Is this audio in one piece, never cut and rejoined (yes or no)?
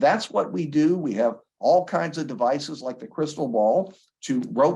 yes